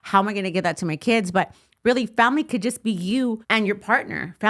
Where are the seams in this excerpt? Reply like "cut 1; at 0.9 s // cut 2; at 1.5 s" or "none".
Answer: cut 1; at 3.4 s